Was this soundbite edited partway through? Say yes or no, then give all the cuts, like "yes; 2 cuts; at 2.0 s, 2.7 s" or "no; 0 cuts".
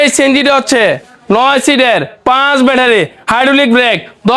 no; 0 cuts